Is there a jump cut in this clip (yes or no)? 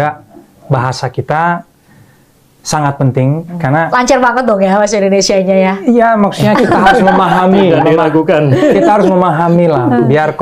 no